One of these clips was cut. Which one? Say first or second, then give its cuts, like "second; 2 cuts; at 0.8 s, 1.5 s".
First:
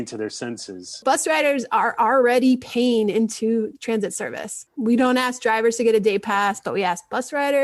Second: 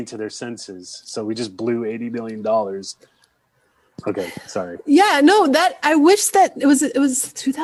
first; 2 cuts; at 1.0 s, 4.7 s